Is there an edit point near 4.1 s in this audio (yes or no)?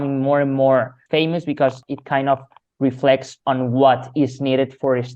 no